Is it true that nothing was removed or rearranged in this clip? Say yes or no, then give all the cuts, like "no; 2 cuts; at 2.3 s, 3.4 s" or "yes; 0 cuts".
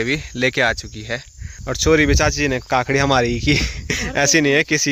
yes; 0 cuts